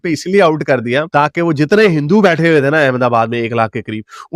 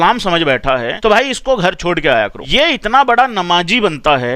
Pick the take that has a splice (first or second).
second